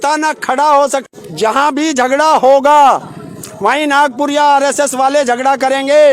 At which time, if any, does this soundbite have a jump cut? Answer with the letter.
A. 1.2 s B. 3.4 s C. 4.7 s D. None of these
A